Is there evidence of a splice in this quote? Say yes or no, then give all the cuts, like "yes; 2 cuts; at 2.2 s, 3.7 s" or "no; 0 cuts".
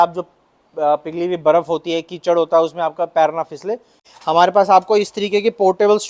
yes; 1 cut; at 4.1 s